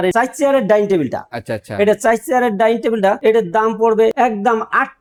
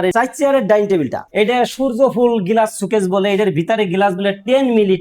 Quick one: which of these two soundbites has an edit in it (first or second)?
second